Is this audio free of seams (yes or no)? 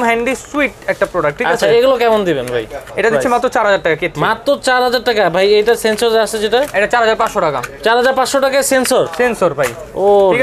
yes